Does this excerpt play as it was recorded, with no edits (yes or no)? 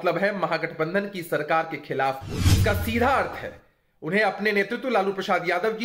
no